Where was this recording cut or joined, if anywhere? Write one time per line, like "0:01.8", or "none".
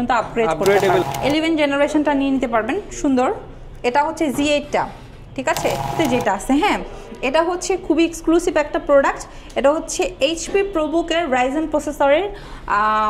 0:01.1
0:05.9